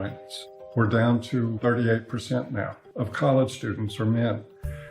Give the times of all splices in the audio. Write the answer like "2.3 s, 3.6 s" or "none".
2.8 s